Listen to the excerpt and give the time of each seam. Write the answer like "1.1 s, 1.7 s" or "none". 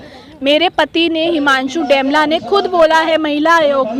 none